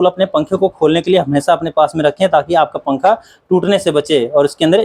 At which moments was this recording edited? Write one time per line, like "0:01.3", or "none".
none